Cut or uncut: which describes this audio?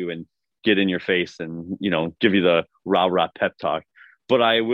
uncut